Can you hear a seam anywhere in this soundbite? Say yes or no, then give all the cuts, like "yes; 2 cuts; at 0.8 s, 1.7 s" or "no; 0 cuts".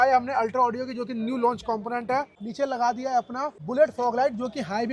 yes; 2 cuts; at 2.4 s, 3.5 s